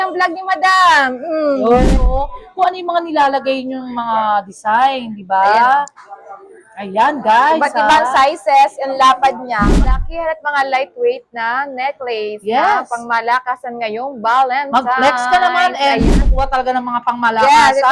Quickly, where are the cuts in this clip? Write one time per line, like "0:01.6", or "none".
0:01.8
0:09.9
0:16.2